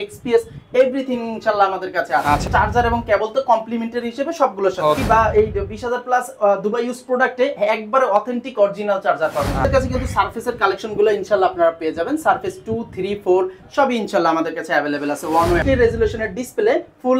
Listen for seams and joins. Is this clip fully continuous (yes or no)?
no